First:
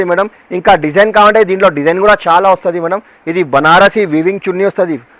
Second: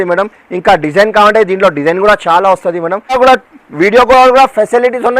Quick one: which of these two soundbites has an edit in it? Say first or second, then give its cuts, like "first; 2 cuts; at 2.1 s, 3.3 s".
second; 1 cut; at 3.2 s